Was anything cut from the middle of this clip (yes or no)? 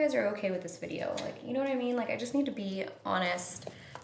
no